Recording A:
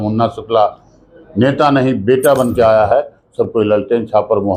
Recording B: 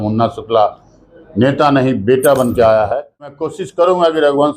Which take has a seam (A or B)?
B